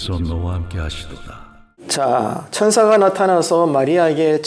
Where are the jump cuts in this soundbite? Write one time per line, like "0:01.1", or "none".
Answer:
none